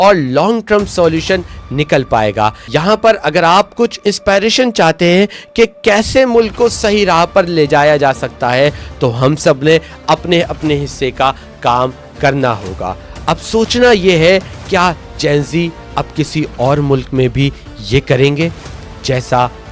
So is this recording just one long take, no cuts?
yes; 0 cuts

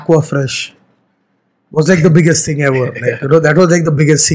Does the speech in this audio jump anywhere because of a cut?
no; 0 cuts

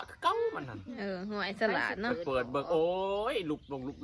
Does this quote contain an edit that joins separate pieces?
no; 0 cuts

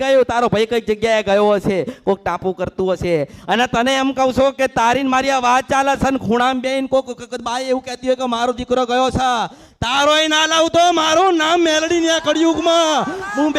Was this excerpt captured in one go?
yes; 0 cuts

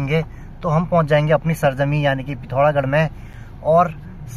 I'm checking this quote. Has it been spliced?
no; 0 cuts

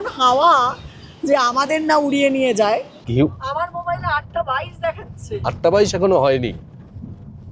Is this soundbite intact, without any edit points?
no; 1 cut; at 3.0 s

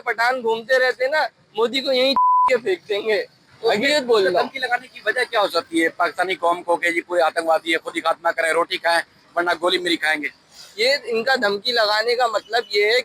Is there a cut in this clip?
no; 0 cuts

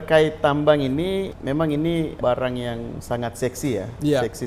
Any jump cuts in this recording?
no; 0 cuts

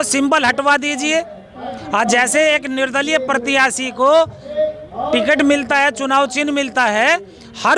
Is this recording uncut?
yes; 0 cuts

